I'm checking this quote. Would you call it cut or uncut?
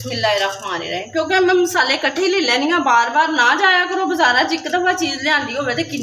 uncut